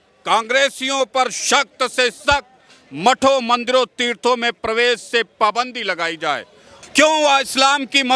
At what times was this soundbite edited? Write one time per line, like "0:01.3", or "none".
0:06.8